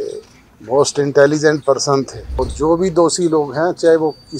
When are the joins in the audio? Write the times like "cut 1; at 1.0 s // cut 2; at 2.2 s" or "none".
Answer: cut 1; at 2.2 s